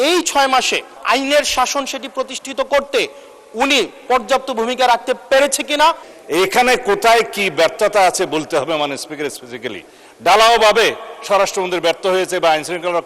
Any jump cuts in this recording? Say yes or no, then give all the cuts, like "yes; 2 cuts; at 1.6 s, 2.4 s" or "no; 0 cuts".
yes; 2 cuts; at 0.9 s, 6.1 s